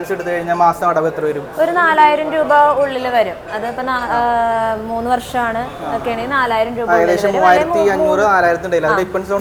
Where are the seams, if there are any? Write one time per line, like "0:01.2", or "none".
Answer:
none